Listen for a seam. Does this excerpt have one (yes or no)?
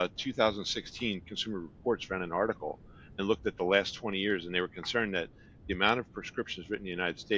no